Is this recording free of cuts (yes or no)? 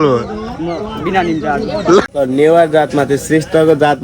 no